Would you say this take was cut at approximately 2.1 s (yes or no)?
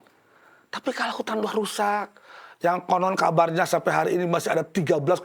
no